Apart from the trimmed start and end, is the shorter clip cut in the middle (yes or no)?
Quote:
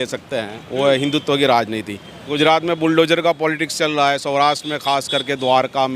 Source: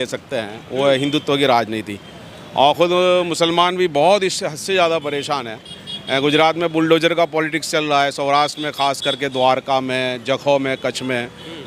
yes